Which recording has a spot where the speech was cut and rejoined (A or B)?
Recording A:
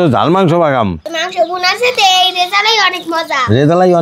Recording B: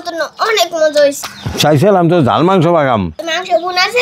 B